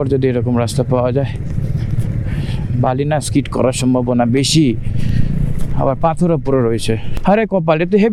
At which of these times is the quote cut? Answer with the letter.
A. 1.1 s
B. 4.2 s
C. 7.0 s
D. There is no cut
D